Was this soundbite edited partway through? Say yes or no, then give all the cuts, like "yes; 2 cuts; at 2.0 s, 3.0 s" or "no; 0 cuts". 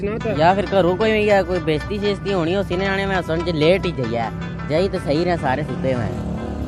no; 0 cuts